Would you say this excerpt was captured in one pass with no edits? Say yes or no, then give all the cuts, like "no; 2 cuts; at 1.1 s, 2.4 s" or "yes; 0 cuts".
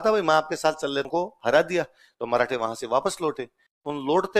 no; 1 cut; at 1.1 s